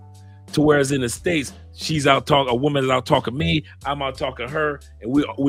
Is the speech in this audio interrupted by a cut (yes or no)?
no